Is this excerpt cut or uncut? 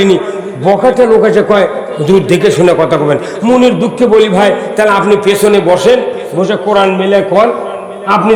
uncut